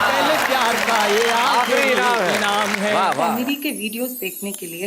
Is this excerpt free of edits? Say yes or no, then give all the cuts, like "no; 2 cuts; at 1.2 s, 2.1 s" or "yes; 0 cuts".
no; 1 cut; at 3.3 s